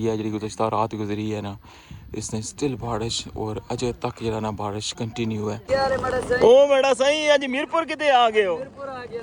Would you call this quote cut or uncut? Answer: cut